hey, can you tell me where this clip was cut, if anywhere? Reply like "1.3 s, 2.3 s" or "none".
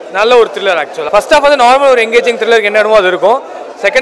1.0 s